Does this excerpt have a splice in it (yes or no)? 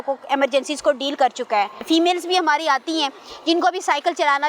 no